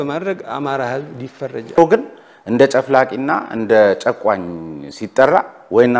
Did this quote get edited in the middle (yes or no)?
yes